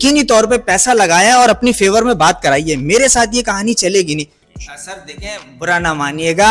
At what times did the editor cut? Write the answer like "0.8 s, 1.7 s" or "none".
4.4 s